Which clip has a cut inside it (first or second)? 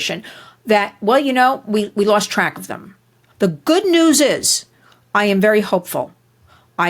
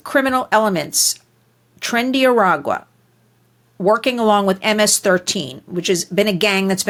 first